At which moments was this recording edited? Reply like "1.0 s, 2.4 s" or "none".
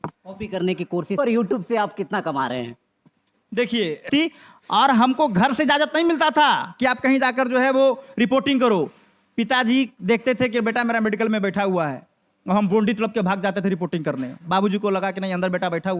1.2 s, 4.1 s